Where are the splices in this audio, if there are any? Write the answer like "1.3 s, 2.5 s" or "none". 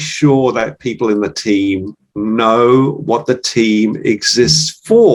none